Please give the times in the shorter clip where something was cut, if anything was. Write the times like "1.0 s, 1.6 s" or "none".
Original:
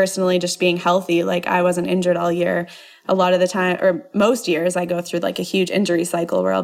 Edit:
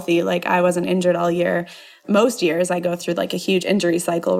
2.0 s